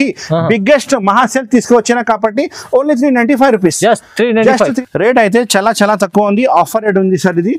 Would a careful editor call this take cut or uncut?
cut